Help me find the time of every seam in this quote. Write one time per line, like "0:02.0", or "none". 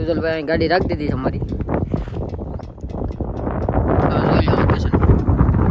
none